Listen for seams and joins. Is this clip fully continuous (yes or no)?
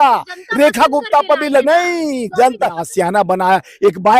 no